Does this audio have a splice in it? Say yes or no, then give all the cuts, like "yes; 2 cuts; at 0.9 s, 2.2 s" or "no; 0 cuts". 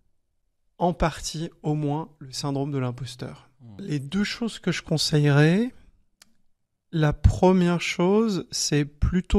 yes; 1 cut; at 3.7 s